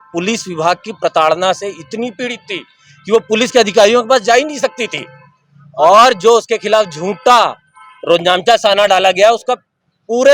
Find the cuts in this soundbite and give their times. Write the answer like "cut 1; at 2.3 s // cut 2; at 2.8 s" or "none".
none